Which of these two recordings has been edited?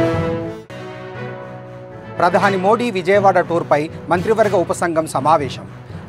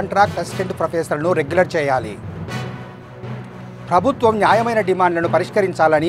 first; 1 cut; at 2.2 s

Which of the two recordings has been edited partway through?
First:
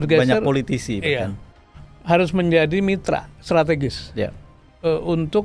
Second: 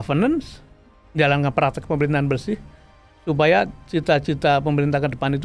first; 1 cut; at 1.5 s

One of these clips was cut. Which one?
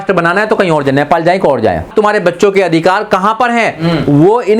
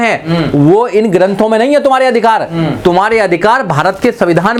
first; 1 cut; at 1.9 s

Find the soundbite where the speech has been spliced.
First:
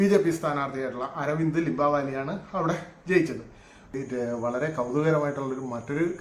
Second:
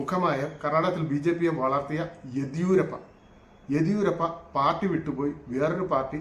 first; 1 cut; at 3.9 s

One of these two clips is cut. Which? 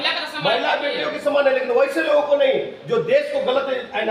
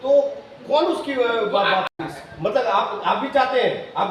second; 1 cut; at 1.9 s

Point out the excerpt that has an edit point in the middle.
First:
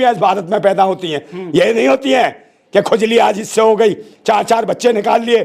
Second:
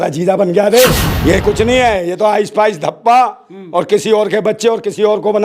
second; 1 cut; at 1.1 s

